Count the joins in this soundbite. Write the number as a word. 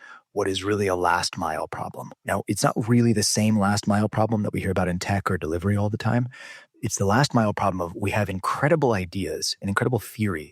one